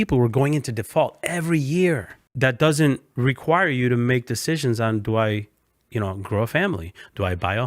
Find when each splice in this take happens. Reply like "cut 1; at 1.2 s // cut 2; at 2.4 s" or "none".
cut 1; at 2.2 s // cut 2; at 3.1 s